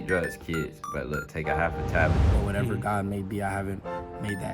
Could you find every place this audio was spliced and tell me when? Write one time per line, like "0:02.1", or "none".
0:02.2